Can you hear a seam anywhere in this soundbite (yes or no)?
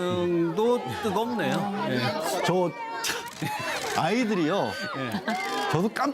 yes